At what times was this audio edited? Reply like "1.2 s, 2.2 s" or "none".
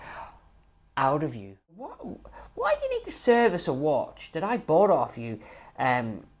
1.9 s